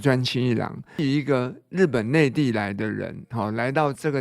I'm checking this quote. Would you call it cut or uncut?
cut